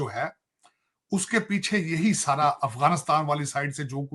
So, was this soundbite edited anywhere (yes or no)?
no